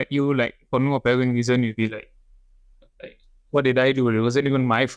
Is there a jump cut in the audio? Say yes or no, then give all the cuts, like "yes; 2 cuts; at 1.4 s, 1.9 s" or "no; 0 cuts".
no; 0 cuts